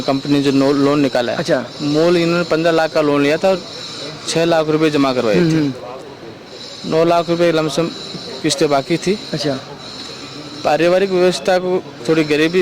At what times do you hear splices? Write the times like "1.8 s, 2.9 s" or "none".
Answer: none